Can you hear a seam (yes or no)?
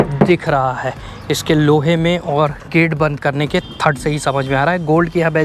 no